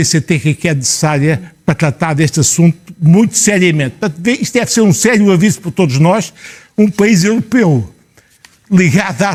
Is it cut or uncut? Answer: uncut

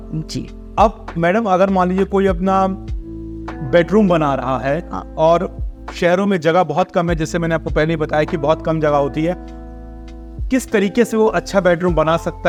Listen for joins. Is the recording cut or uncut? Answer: uncut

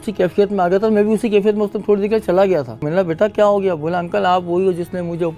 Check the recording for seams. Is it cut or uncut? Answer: cut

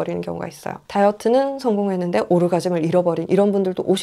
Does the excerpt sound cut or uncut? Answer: uncut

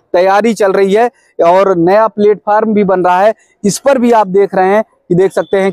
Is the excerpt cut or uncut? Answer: uncut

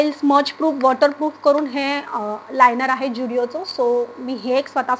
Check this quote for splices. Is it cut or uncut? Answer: uncut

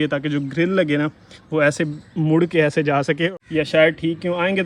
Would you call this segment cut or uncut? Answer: cut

